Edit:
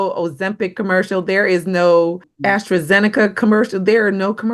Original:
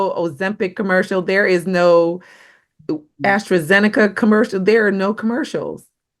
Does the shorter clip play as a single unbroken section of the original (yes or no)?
no